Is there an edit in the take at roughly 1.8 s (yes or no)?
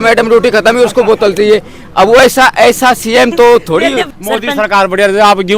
no